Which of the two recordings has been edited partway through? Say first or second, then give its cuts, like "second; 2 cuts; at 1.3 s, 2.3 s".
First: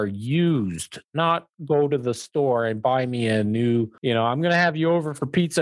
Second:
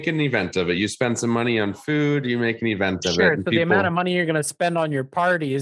first; 1 cut; at 3.9 s